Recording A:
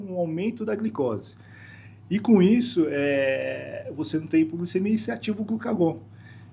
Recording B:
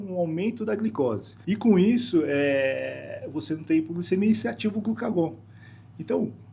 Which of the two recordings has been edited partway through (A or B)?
B